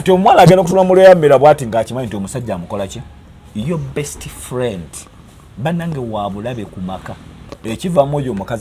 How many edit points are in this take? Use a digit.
1